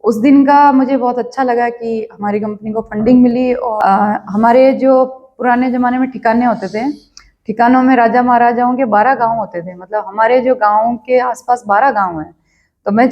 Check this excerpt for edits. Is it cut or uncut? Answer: cut